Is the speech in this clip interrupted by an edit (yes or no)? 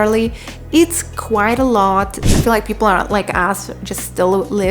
yes